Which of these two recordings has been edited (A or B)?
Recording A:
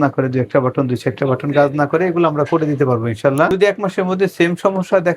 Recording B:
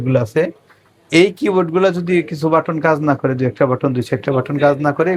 A